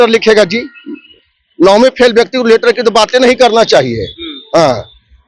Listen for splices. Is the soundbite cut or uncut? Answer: uncut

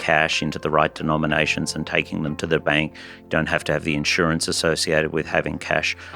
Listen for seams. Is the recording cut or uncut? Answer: uncut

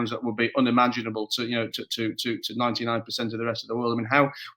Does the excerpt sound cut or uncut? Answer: uncut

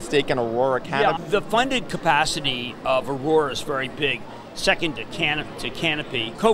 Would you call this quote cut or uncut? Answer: uncut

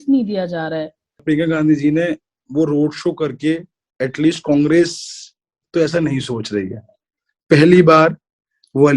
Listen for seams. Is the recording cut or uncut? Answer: cut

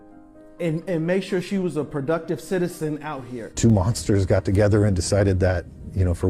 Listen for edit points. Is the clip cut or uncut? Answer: cut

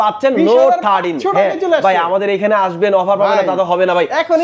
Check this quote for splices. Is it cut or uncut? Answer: uncut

